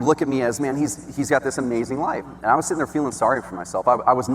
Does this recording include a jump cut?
yes; 1 cut; at 2.3 s

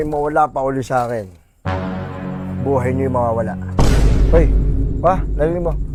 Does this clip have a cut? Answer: no; 0 cuts

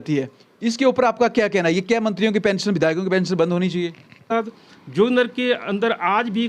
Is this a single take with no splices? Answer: no; 1 cut; at 4.2 s

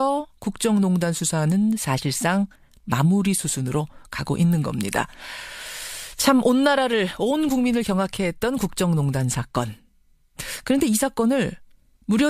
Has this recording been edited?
no; 0 cuts

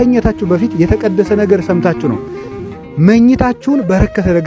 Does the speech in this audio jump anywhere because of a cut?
no; 0 cuts

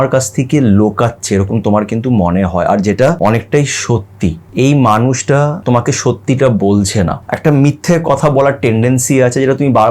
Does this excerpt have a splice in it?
yes; 4 cuts; at 3.2 s, 4.4 s, 5.6 s, 7.2 s

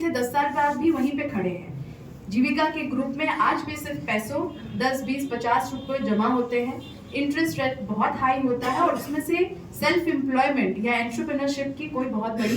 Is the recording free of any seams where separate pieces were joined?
yes; 0 cuts

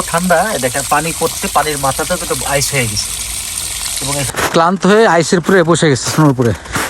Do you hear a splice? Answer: yes; 1 cut; at 4.1 s

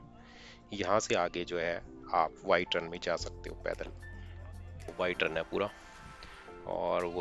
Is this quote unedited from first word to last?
no; 1 cut; at 4.9 s

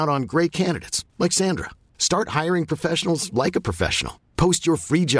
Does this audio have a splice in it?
no; 0 cuts

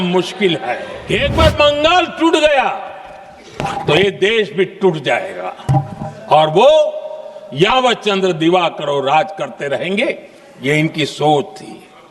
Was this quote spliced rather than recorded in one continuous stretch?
yes; 1 cut; at 0.9 s

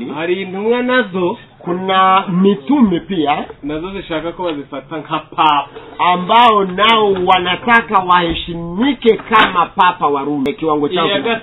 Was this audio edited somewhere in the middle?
yes; 1 cut; at 10.5 s

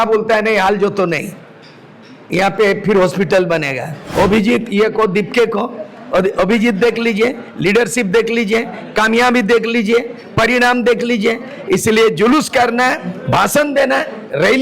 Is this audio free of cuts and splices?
no; 1 cut; at 4.0 s

